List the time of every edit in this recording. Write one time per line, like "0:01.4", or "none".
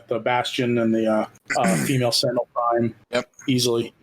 0:01.4
0:03.0